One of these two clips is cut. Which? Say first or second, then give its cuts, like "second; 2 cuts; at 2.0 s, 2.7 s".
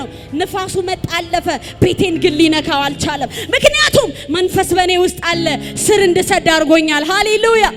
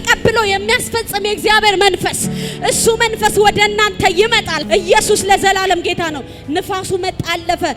second; 1 cut; at 4.5 s